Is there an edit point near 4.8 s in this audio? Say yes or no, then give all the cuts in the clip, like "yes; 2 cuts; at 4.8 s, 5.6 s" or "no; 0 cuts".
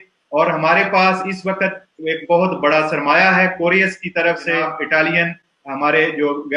yes; 1 cut; at 4.8 s